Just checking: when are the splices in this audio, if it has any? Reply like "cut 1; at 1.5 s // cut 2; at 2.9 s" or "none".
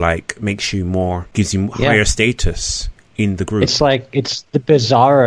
cut 1; at 1.3 s